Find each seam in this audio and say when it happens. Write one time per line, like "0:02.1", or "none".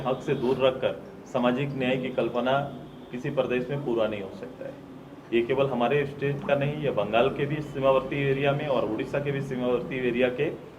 none